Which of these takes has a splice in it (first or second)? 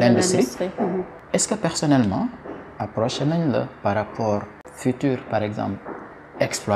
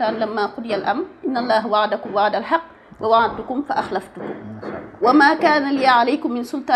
first